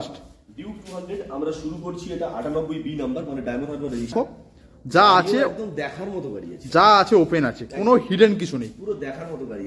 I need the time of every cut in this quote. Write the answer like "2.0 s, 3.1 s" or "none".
4.1 s